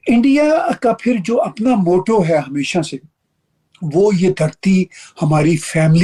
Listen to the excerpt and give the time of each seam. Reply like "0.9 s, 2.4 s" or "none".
none